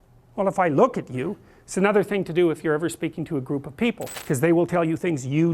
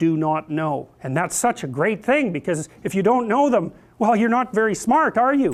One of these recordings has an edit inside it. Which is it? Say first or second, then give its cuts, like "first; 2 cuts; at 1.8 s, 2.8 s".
first; 1 cut; at 4.1 s